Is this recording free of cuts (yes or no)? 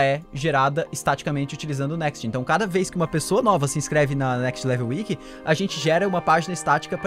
yes